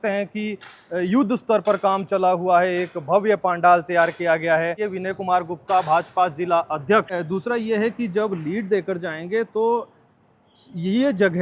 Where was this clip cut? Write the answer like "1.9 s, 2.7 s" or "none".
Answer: 4.8 s, 7.2 s